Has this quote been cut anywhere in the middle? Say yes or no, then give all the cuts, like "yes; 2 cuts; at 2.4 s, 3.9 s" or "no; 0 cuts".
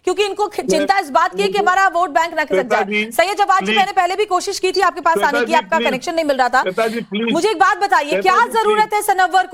no; 0 cuts